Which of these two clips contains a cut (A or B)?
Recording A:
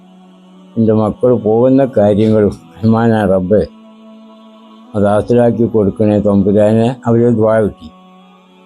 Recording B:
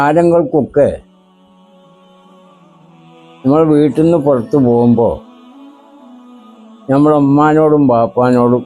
B